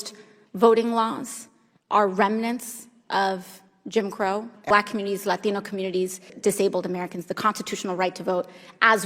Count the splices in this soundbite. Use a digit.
2